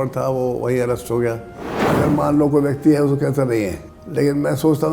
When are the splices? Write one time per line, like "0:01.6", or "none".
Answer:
0:01.7